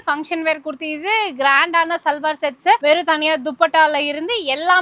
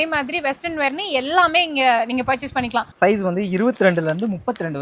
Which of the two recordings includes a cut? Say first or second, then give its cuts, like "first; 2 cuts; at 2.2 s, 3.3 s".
second; 1 cut; at 2.9 s